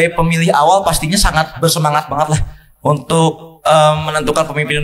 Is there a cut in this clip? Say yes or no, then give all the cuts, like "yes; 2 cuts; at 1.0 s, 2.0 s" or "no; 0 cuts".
no; 0 cuts